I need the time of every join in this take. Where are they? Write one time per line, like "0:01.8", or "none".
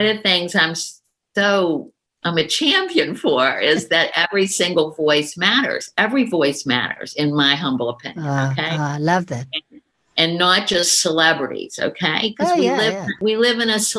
0:13.1